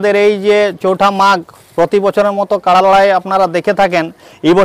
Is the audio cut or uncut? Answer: uncut